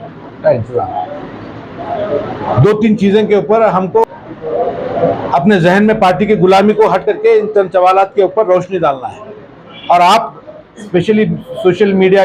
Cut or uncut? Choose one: cut